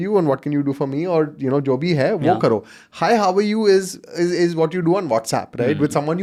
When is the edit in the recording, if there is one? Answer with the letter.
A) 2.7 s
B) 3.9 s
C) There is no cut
C